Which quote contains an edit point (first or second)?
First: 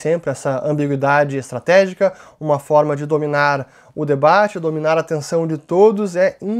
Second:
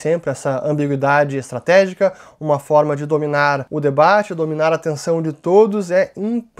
second